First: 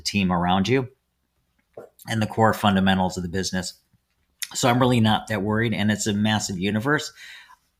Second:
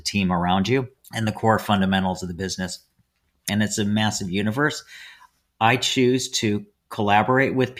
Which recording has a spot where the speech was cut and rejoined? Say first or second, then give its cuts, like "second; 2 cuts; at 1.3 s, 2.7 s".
second; 2 cuts; at 1.0 s, 3.5 s